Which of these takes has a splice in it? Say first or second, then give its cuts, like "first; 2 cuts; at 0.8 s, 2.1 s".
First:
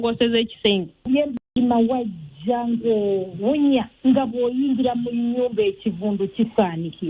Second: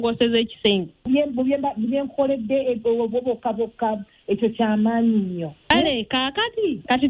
first; 1 cut; at 1.4 s